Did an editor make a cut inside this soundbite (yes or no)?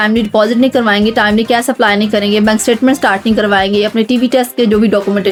no